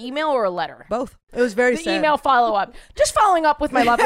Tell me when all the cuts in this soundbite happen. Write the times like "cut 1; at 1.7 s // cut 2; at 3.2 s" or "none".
cut 1; at 1.2 s

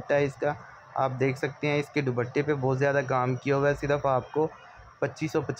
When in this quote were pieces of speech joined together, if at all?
none

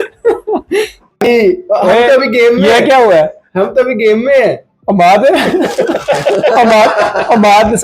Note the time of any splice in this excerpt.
cut 1; at 1.0 s

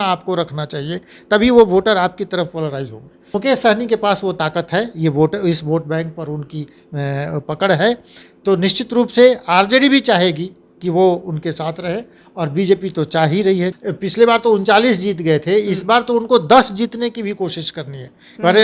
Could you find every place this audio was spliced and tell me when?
cut 1; at 3.3 s // cut 2; at 13.8 s

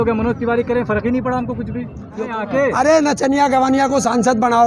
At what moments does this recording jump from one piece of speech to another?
cut 1; at 2.3 s

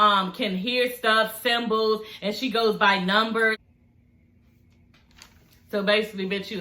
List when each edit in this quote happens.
cut 1; at 3.6 s

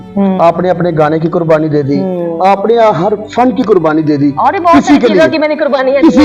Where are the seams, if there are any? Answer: none

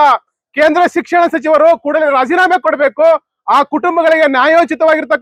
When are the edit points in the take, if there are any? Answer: none

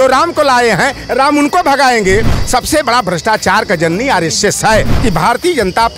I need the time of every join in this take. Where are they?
cut 1; at 2.3 s // cut 2; at 4.9 s

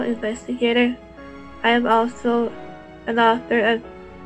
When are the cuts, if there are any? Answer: cut 1; at 2.1 s

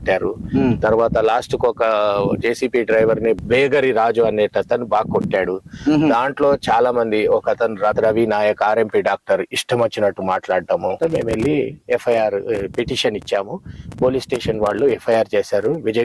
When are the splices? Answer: cut 1; at 3.4 s // cut 2; at 7.9 s // cut 3; at 11.0 s

